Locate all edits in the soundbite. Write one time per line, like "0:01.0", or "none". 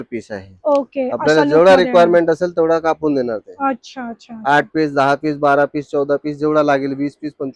none